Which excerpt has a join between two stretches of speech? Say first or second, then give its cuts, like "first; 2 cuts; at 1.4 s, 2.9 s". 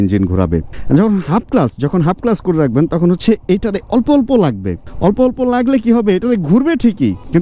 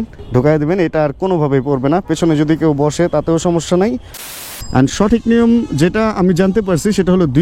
second; 1 cut; at 4.2 s